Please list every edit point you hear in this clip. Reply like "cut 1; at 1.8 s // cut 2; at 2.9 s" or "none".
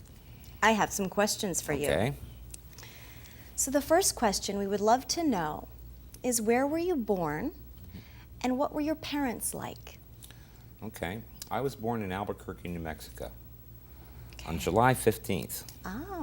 cut 1; at 1.6 s